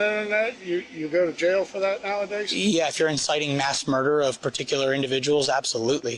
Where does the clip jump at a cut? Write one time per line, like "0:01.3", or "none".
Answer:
none